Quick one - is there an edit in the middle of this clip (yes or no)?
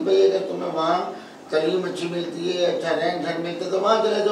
no